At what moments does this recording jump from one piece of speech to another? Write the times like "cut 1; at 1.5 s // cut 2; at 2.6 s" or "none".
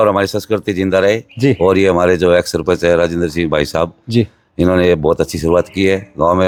none